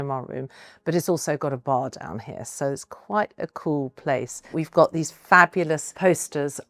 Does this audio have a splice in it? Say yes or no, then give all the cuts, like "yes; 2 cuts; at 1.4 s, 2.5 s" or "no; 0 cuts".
no; 0 cuts